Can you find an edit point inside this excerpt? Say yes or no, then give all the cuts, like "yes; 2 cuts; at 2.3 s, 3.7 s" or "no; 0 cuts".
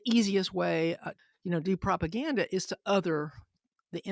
yes; 1 cut; at 1.1 s